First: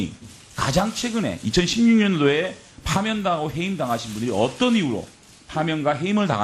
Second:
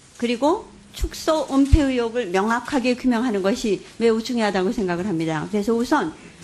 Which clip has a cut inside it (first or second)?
second